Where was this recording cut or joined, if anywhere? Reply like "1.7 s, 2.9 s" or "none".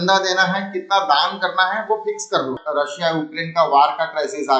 2.6 s